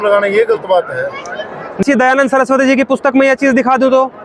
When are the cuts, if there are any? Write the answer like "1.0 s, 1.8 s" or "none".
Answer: 1.8 s